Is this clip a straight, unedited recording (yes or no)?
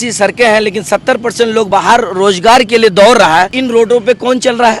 no